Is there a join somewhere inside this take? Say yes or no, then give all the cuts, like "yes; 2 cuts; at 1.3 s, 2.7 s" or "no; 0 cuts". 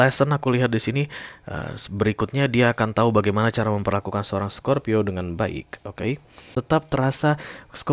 yes; 1 cut; at 6.4 s